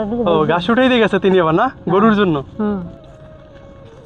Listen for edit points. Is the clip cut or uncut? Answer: uncut